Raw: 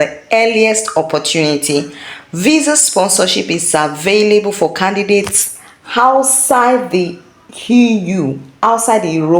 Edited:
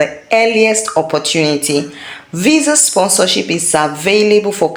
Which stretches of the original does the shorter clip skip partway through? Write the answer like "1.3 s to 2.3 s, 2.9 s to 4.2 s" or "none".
none